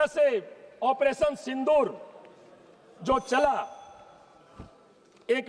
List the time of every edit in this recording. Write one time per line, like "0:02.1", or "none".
none